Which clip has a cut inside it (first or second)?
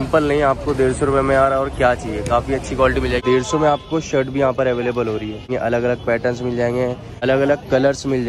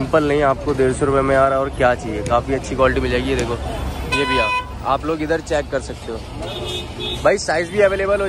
first